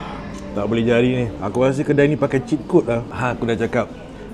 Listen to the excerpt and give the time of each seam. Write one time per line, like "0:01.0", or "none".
0:01.4
0:03.1